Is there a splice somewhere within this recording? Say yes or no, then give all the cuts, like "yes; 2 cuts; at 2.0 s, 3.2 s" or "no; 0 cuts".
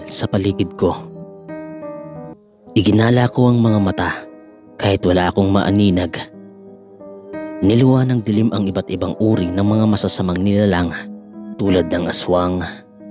yes; 2 cuts; at 1.1 s, 2.6 s